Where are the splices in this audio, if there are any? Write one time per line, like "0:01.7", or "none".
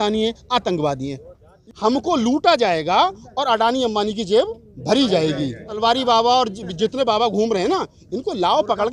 0:01.6
0:05.8